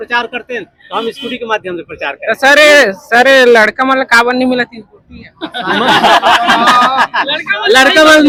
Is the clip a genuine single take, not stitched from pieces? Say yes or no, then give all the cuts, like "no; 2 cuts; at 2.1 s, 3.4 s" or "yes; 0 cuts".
yes; 0 cuts